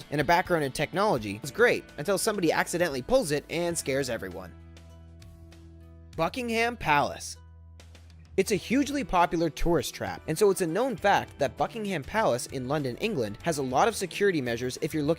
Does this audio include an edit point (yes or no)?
yes